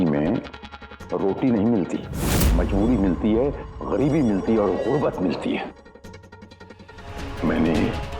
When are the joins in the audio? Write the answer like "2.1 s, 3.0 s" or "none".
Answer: 2.5 s, 7.2 s